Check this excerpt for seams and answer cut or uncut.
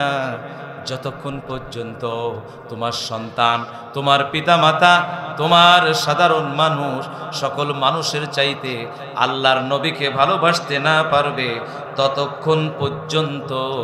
uncut